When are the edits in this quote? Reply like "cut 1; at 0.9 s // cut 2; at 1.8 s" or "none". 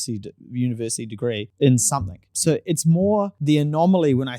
cut 1; at 1.5 s // cut 2; at 2.3 s // cut 3; at 3.3 s